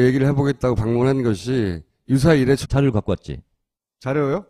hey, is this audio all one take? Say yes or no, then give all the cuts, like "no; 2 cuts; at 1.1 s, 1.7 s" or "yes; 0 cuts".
yes; 0 cuts